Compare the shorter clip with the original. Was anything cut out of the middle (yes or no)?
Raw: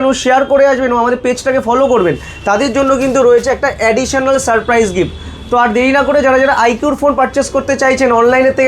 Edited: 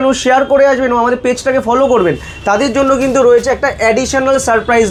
no